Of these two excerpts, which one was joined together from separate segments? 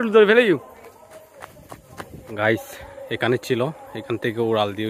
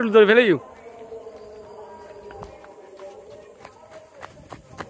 first; 2 cuts; at 0.9 s, 2.3 s

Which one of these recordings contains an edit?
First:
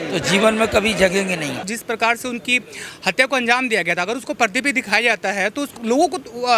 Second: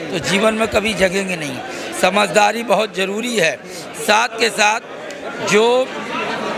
first; 2 cuts; at 1.7 s, 5.7 s

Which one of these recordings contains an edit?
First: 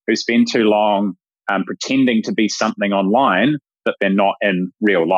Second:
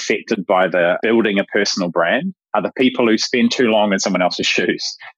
second; 3 cuts; at 1.0 s, 2.4 s, 3.3 s

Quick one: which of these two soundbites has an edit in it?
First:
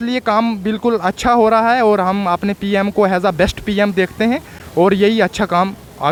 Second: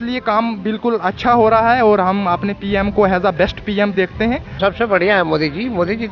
second; 1 cut; at 4.6 s

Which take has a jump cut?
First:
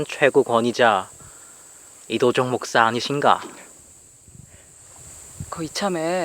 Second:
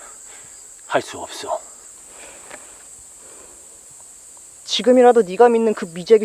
second; 1 cut; at 1.9 s

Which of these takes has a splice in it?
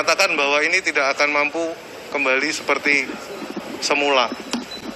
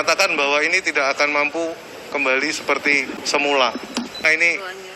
second; 2 cuts; at 3.2 s, 4.2 s

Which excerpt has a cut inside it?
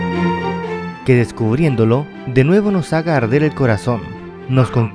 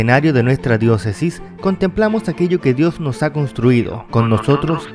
first; 1 cut; at 0.9 s

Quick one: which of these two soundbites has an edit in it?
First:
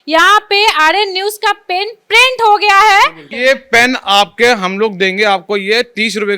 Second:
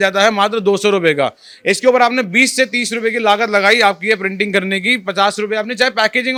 first; 1 cut; at 3.3 s

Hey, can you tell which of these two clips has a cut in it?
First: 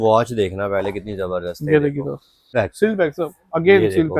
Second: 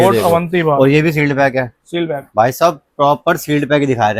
first; 1 cut; at 2.5 s

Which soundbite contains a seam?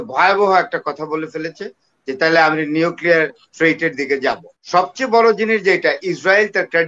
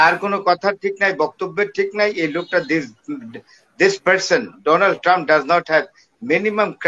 first; 1 cut; at 4.5 s

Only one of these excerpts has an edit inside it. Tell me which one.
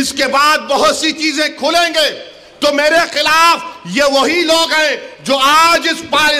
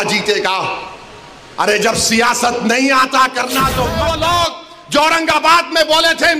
second; 1 cut; at 3.9 s

